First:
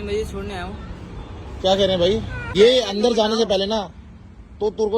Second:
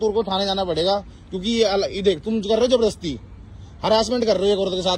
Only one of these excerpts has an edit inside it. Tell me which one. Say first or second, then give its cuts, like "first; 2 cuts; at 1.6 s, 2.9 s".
first; 1 cut; at 2.4 s